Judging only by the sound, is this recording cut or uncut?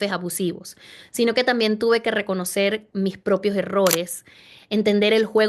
uncut